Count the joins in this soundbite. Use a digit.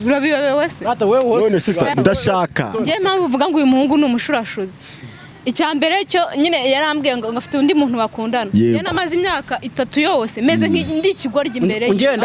1